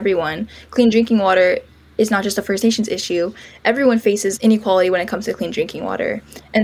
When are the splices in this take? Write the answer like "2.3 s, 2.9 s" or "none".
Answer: 4.3 s